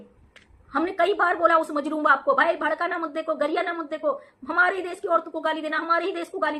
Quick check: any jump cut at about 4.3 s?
no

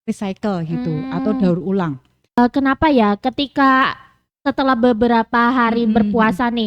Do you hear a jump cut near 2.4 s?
yes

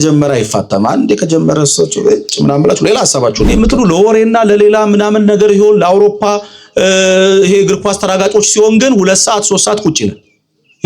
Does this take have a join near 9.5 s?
no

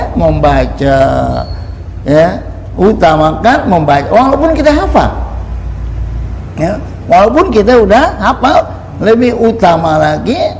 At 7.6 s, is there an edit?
no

